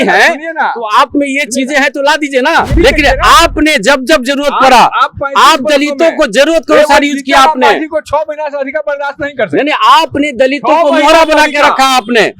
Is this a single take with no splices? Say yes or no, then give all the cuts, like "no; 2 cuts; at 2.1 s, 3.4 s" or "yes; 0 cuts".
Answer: no; 1 cut; at 2.7 s